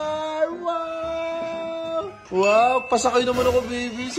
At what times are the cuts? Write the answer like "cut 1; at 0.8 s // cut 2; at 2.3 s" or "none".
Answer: cut 1; at 2.2 s